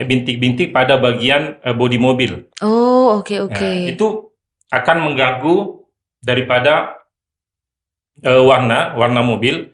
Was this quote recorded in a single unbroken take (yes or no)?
yes